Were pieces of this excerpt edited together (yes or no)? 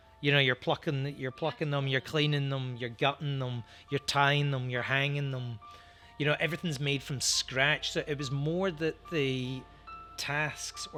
no